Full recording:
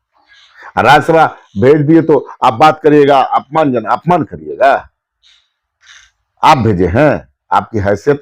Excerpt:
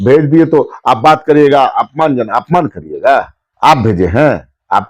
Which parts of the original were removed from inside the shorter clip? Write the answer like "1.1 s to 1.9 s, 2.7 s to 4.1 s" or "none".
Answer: 5.0 s to 6.2 s